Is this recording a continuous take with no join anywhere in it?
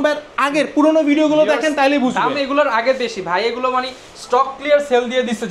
yes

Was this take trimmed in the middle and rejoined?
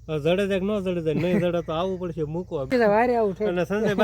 yes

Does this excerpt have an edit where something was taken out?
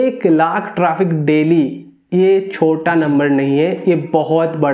no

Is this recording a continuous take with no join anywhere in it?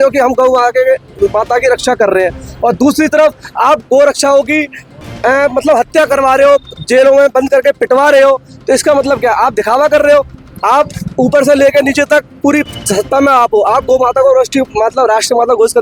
yes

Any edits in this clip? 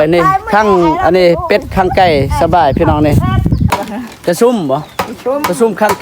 yes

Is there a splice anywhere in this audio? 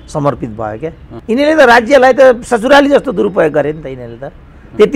yes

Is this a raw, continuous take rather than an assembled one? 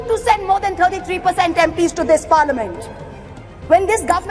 yes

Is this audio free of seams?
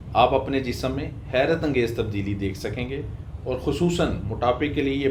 yes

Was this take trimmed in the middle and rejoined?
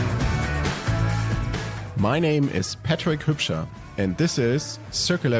no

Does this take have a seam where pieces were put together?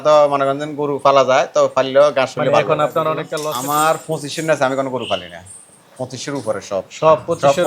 yes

